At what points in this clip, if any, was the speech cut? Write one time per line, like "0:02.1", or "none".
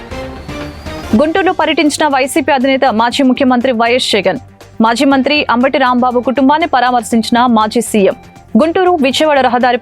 0:01.0